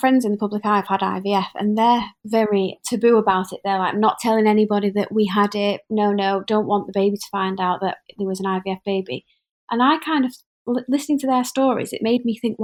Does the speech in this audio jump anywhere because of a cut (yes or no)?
no